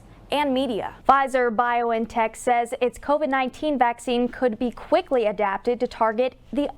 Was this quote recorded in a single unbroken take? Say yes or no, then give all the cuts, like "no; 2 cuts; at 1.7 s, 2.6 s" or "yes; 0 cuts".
no; 1 cut; at 0.9 s